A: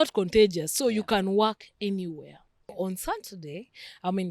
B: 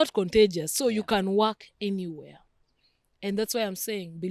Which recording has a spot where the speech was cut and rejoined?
A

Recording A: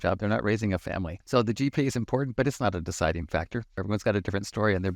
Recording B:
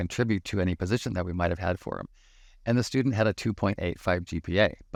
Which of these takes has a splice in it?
A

